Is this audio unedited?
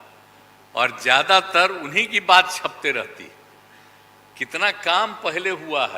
yes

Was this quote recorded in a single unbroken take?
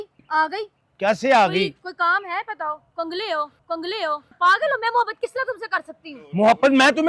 no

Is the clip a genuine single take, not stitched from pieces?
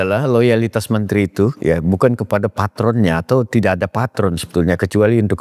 yes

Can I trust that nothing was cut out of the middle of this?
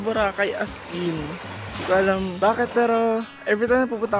yes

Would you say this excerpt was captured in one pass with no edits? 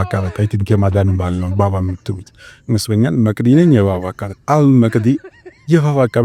yes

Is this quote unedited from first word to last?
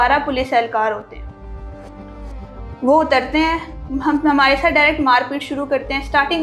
yes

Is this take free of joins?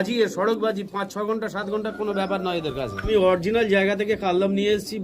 no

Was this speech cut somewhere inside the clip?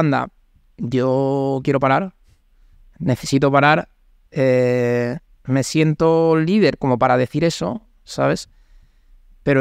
no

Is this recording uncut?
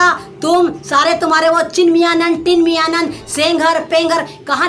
yes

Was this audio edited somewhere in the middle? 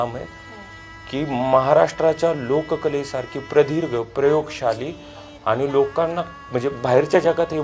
no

